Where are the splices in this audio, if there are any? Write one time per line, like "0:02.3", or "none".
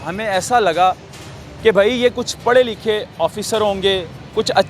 none

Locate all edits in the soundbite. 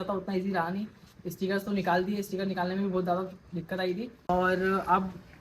0:04.3

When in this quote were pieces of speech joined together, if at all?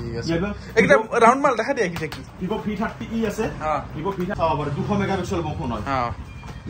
0:04.3

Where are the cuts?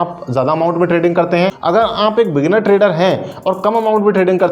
0:01.6

